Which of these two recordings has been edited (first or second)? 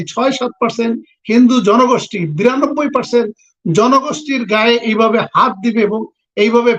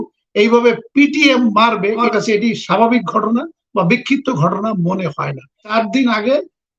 second